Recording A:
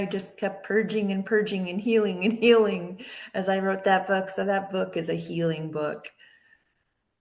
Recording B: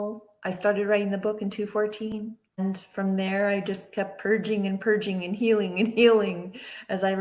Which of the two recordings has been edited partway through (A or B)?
B